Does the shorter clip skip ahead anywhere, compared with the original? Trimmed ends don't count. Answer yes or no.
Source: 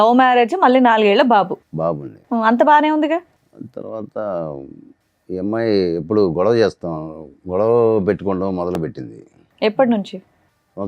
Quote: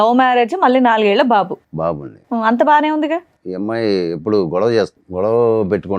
yes